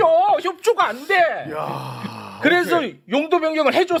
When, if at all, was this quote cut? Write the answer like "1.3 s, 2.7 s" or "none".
none